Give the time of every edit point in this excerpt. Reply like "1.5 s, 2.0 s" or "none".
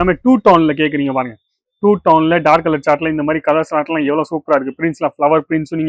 none

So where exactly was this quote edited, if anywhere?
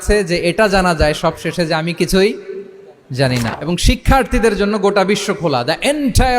3.5 s

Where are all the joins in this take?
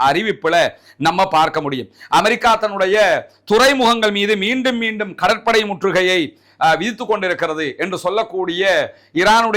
none

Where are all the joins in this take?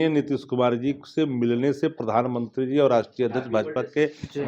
none

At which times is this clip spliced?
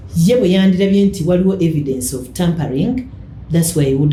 none

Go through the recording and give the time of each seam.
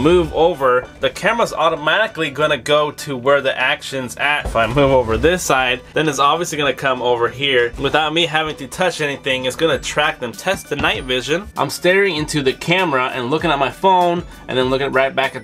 4.5 s, 5.8 s, 7.7 s, 10.3 s, 11.5 s

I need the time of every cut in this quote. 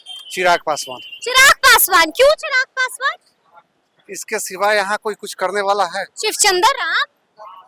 none

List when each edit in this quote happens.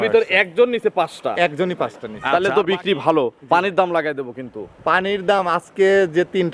2.1 s

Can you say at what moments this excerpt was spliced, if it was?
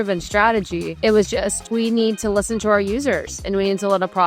0.9 s, 1.6 s

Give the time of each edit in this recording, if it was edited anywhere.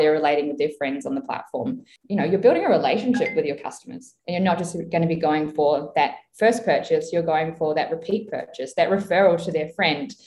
1.9 s, 4.2 s

